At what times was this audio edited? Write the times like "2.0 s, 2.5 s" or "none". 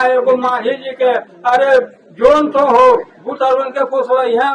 none